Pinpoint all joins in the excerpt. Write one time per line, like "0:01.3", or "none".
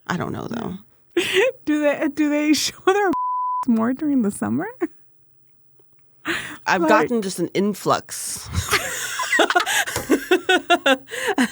0:00.9